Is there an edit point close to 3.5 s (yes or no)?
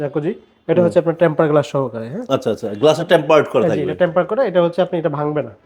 no